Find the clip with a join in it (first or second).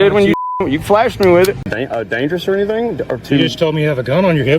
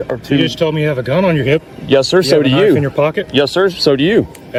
first